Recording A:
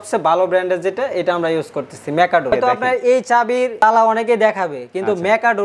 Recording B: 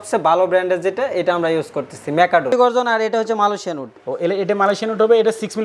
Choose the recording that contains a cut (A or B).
B